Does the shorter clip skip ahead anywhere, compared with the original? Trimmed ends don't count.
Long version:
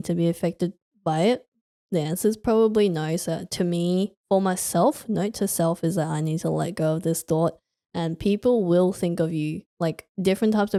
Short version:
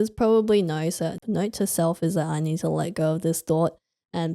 yes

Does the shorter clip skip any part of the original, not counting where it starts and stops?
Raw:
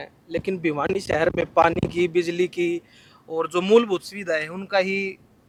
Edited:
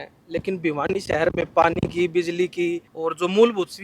yes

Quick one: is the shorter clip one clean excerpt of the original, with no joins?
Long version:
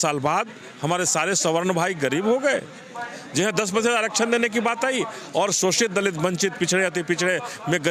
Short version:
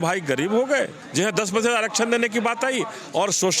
no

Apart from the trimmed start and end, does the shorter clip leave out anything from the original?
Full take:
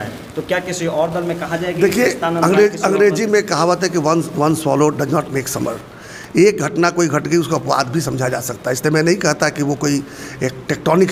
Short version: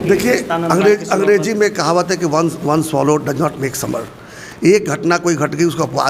no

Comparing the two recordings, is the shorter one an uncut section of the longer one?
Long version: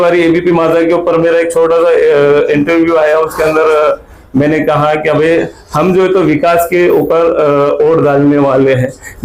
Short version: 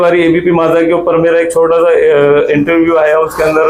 yes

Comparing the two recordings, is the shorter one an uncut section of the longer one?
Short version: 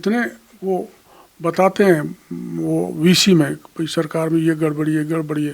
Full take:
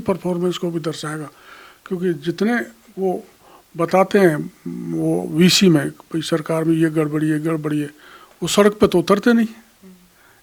yes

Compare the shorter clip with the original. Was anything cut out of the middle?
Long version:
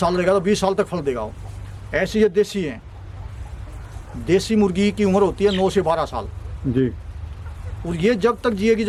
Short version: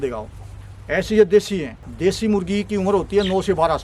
yes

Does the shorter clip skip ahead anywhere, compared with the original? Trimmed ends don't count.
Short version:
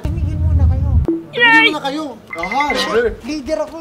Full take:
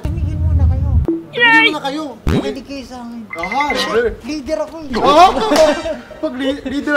yes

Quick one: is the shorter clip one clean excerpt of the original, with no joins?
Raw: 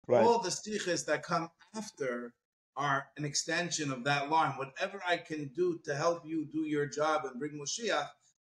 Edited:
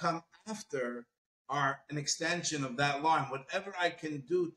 yes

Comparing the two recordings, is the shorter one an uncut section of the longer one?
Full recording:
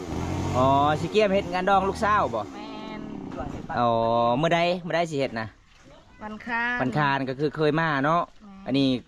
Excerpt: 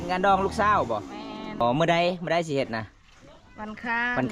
no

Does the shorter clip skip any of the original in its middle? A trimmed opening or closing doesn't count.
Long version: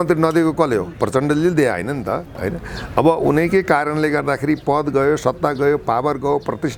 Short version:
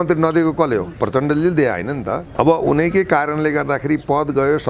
yes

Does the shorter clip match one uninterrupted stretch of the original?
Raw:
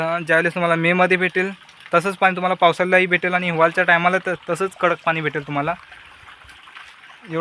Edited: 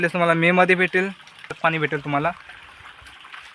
no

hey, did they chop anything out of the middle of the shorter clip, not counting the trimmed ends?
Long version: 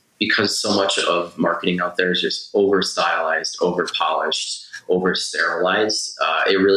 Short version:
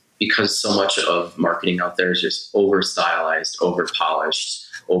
no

